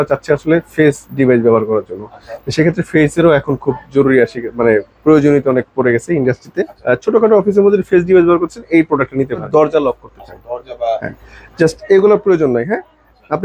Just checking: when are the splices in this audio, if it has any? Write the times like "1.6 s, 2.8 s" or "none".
6.7 s, 9.5 s

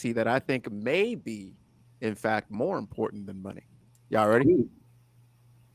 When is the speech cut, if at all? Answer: none

